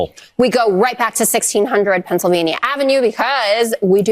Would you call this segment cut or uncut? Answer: uncut